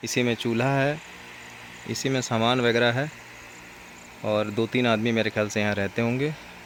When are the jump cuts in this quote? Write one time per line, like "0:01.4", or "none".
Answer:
none